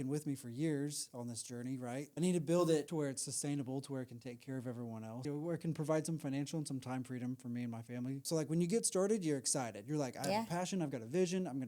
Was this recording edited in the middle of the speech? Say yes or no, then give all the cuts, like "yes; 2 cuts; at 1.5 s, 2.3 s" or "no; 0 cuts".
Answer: yes; 4 cuts; at 2.1 s, 2.9 s, 5.2 s, 8.2 s